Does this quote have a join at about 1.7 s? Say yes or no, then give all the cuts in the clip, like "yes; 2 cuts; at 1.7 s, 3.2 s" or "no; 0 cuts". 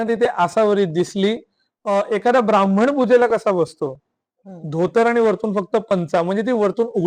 no; 0 cuts